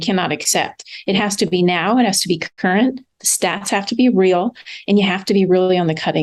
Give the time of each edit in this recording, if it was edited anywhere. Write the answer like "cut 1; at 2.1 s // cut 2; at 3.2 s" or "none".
none